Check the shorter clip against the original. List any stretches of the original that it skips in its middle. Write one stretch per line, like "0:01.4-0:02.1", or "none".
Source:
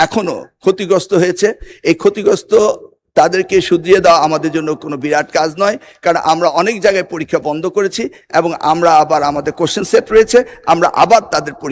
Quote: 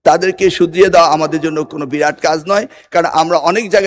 none